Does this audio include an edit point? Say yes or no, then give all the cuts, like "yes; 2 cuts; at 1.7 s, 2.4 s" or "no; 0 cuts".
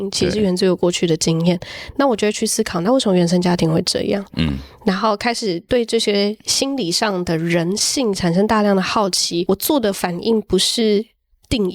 yes; 1 cut; at 9.4 s